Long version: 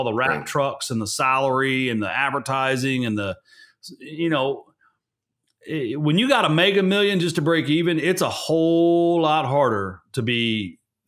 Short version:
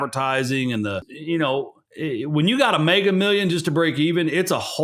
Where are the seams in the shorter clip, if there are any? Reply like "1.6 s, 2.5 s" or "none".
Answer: 1.1 s, 1.8 s